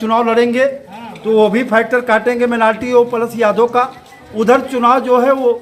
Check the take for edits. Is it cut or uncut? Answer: uncut